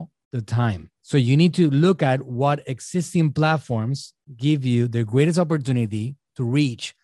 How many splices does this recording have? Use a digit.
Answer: 1